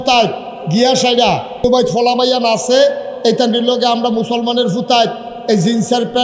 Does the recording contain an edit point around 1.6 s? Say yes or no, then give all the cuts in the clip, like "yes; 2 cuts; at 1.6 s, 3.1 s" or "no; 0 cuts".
yes; 1 cut; at 1.6 s